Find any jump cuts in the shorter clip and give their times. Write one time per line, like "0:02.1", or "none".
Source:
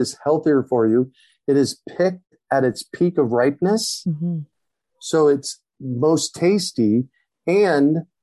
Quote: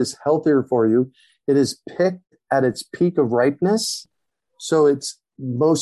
0:04.0